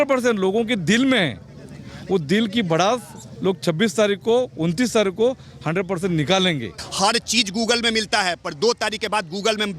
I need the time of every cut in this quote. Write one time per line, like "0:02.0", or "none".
0:06.8